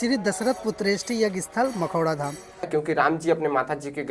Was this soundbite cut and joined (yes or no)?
yes